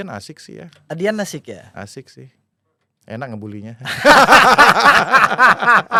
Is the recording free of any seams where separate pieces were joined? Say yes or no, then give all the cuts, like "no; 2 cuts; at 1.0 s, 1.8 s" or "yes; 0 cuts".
yes; 0 cuts